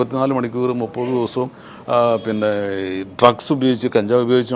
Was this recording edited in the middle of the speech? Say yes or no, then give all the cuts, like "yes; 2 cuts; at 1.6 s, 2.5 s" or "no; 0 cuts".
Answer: no; 0 cuts